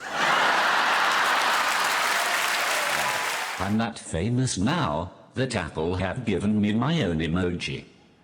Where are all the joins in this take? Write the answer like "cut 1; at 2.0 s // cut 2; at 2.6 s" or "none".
cut 1; at 3.4 s